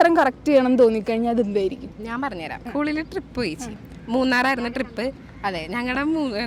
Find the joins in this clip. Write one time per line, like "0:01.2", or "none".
0:02.4

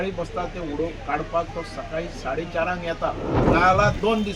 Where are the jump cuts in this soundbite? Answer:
0:03.4

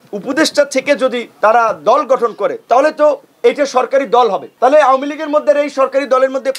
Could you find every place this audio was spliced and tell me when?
0:01.3
0:02.6
0:04.4

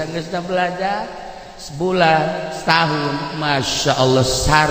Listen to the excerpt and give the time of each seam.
none

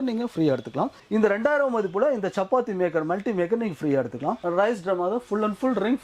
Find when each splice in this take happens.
0:00.9
0:04.4

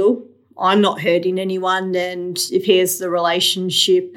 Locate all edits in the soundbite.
none

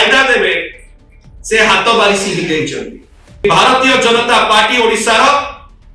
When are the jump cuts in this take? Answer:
0:03.4

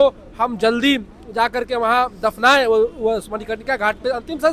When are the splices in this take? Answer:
none

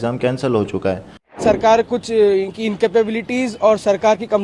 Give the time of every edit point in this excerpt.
0:01.3

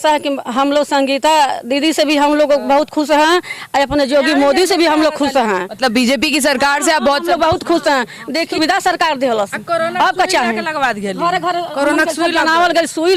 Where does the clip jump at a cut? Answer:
0:08.5

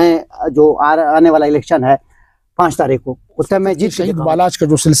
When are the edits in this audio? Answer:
0:04.1

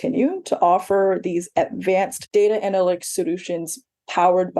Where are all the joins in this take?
0:02.2

